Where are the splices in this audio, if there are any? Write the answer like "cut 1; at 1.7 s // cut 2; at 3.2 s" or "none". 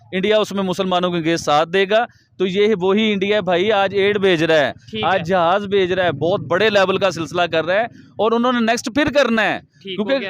none